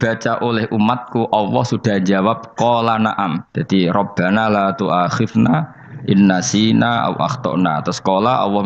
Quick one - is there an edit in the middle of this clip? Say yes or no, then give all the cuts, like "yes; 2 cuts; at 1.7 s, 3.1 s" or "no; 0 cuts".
yes; 1 cut; at 3.5 s